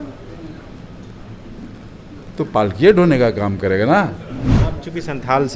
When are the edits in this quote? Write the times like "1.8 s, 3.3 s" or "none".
4.6 s